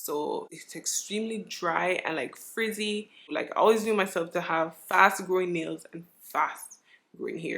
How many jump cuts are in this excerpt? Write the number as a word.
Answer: one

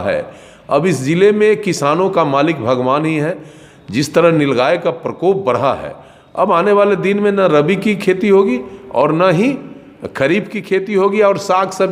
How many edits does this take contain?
zero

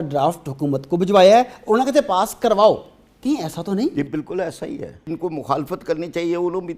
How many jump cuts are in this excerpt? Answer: one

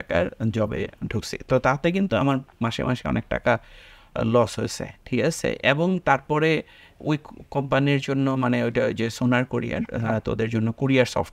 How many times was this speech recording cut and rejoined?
zero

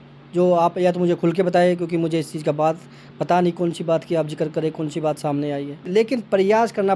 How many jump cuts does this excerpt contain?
one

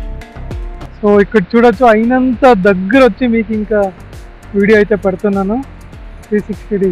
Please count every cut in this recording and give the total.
one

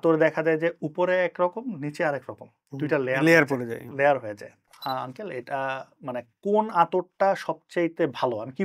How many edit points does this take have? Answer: one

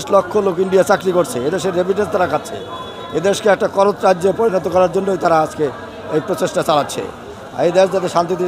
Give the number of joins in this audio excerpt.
zero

